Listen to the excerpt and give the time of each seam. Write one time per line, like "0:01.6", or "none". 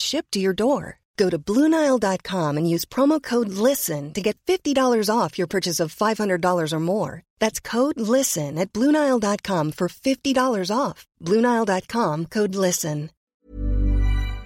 0:13.3